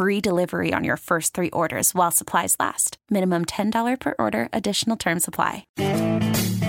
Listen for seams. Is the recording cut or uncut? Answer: cut